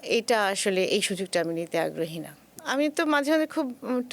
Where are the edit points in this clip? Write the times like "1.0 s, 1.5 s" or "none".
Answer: 2.6 s